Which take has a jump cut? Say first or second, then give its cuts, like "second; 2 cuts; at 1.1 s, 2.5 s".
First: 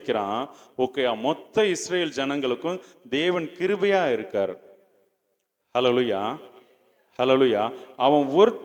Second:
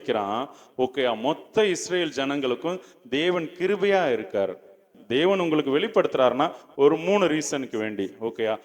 second; 1 cut; at 5.0 s